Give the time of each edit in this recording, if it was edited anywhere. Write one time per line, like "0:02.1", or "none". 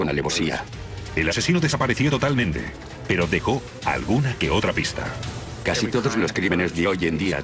none